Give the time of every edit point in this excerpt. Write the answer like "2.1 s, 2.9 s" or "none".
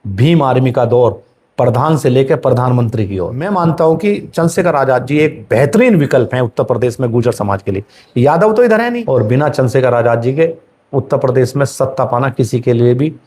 3.4 s, 8.9 s